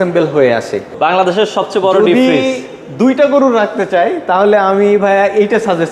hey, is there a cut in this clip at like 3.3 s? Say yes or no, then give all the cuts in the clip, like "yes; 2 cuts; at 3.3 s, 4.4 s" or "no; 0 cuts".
no; 1 cut; at 0.9 s